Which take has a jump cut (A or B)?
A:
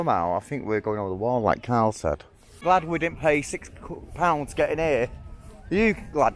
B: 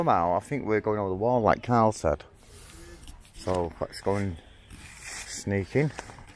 A